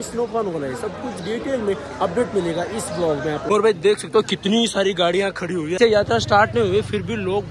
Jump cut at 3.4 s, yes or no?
yes